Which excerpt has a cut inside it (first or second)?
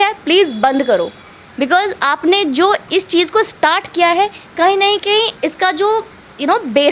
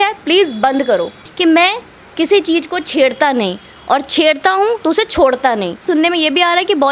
second